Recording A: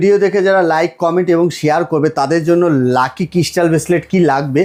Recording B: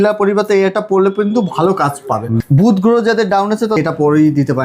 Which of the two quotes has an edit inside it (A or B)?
B